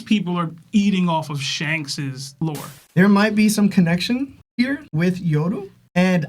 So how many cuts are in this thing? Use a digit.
1